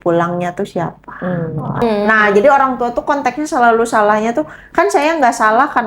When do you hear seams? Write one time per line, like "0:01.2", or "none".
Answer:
0:01.8